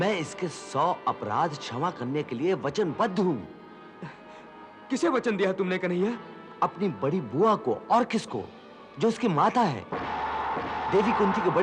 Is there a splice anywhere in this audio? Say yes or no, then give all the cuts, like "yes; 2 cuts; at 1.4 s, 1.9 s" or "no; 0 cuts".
no; 0 cuts